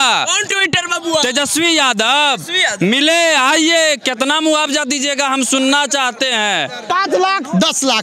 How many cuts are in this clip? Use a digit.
1